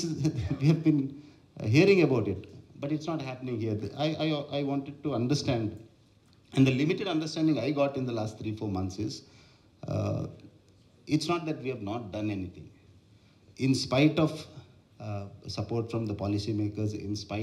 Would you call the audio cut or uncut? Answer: uncut